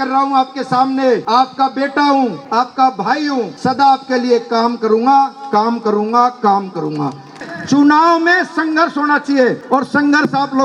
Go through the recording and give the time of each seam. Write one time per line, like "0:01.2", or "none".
0:01.2
0:02.4
0:03.5
0:07.3
0:09.6